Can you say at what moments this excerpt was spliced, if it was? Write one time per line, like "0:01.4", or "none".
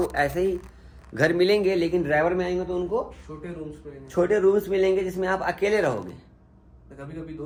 none